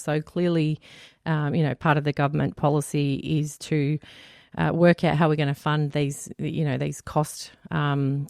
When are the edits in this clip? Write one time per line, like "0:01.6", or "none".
none

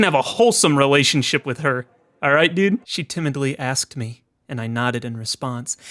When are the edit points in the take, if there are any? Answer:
0:03.0

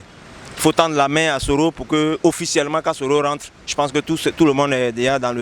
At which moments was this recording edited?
none

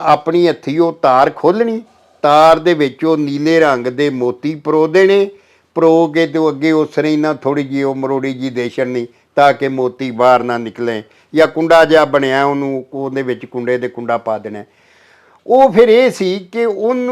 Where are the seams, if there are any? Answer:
none

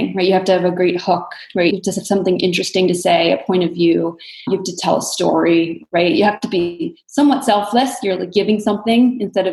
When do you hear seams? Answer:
0:01.7

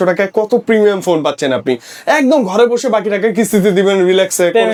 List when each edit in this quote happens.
none

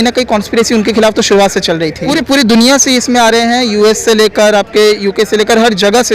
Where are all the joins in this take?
0:02.0

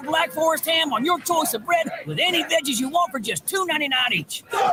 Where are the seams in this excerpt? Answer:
none

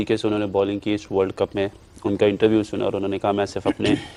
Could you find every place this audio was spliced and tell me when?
none

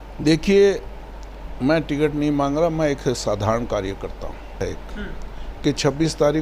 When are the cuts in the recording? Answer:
0:04.6

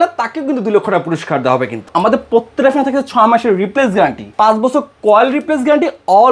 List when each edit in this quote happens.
0:01.9
0:04.2

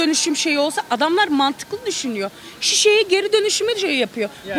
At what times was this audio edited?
none

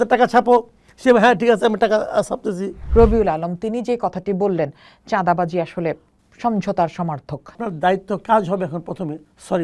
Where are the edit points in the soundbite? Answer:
0:02.7
0:07.6

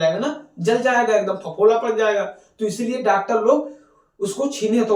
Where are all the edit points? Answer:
none

